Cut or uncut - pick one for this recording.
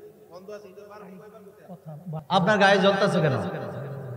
cut